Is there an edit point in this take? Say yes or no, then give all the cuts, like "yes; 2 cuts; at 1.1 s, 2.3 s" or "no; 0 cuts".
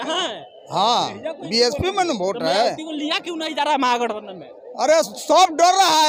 no; 0 cuts